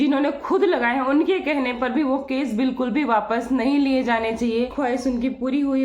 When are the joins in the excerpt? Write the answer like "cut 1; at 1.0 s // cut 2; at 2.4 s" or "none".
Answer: cut 1; at 4.7 s